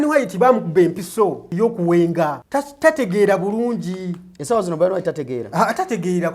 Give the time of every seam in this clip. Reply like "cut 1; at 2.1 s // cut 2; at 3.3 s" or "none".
cut 1; at 1.4 s // cut 2; at 2.4 s